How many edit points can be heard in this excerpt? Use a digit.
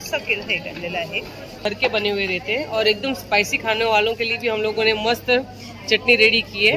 1